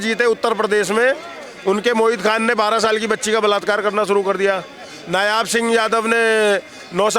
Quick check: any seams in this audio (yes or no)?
no